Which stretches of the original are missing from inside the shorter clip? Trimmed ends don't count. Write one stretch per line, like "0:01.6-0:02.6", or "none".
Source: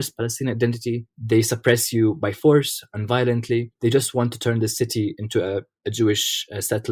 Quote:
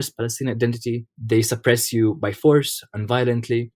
none

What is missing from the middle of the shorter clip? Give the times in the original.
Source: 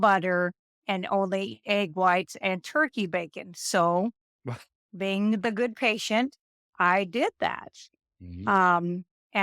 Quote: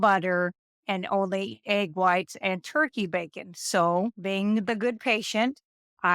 0:04.2-0:04.9

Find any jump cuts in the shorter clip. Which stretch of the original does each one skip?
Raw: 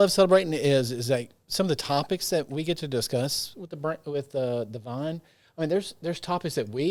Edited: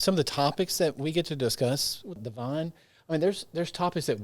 0:03.7-0:04.7

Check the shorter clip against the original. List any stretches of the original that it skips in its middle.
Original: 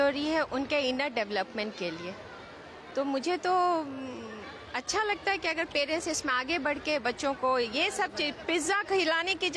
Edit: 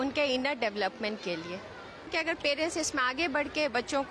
0:02.6-0:05.4

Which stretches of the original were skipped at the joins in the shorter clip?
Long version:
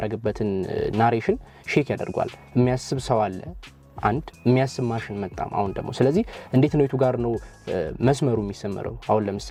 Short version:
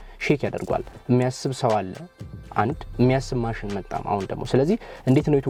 none

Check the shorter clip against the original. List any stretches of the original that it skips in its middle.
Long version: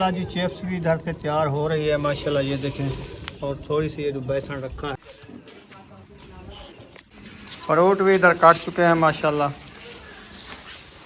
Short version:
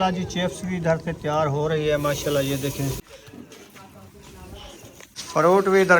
0:03.2-0:05.1
0:07.1-0:07.5

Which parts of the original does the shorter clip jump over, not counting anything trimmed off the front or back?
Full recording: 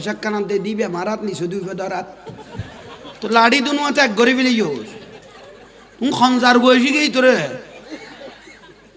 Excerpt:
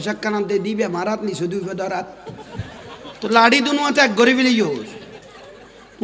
none

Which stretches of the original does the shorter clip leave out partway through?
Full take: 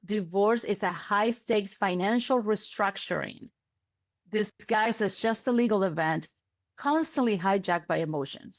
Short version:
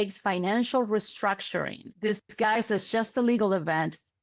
0:03.4-0:04.1

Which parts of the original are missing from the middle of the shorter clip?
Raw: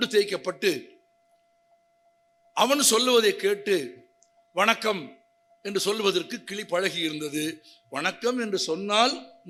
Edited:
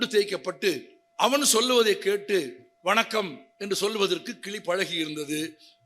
0:01.0-0:02.3
0:04.0-0:04.4
0:05.2-0:05.5

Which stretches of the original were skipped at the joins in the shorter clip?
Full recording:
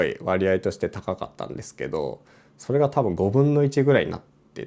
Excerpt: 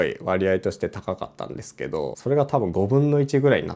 0:02.2-0:02.6

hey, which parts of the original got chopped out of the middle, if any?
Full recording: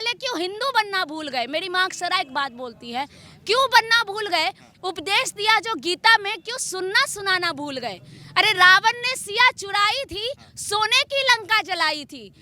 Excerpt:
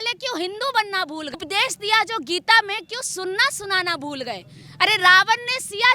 0:01.3-0:04.9

